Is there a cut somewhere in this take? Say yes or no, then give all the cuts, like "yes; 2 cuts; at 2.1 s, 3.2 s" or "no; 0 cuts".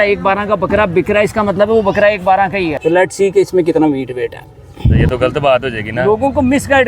yes; 2 cuts; at 2.7 s, 5.1 s